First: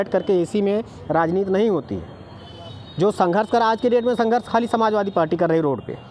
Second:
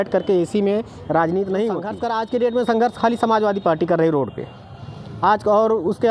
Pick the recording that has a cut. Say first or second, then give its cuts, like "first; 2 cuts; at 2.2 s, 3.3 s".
second; 1 cut; at 1.9 s